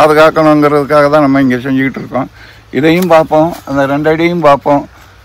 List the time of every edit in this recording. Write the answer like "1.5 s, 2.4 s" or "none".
none